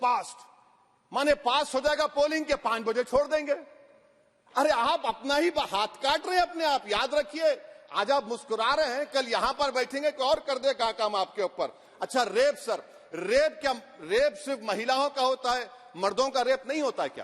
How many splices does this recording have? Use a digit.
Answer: 0